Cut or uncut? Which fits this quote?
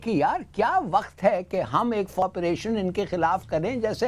cut